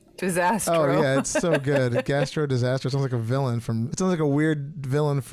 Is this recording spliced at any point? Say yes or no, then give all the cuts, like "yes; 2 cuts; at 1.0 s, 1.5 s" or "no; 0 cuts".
no; 0 cuts